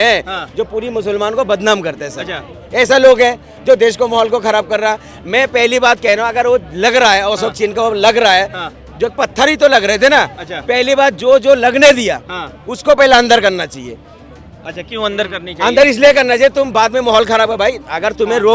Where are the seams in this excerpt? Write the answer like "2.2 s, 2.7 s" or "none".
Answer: none